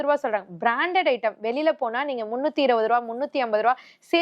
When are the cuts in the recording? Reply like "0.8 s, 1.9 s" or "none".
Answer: none